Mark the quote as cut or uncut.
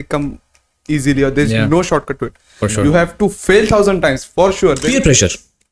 cut